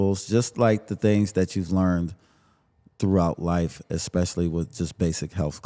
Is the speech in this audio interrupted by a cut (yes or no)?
no